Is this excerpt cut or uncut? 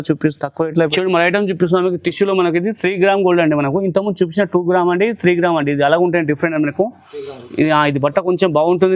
cut